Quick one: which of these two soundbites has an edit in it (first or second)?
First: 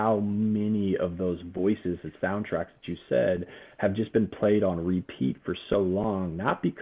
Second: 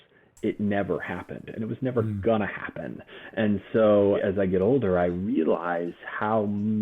second